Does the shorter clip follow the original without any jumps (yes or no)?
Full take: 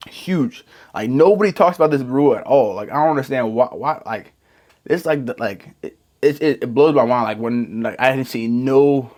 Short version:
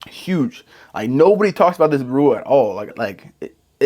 no